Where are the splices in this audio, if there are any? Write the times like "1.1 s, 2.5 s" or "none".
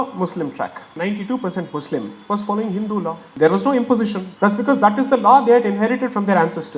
0.9 s, 3.2 s, 4.2 s